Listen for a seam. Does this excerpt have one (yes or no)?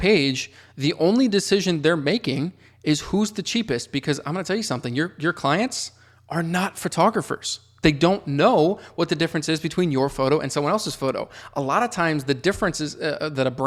no